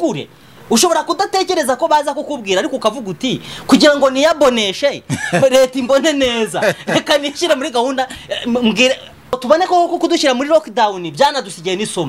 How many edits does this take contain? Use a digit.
1